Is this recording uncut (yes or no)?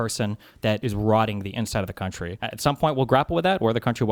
no